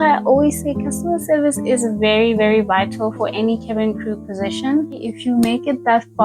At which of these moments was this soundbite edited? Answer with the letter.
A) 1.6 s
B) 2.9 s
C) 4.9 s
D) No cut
C